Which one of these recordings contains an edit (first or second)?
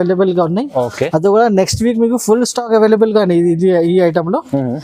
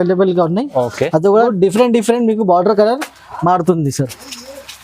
second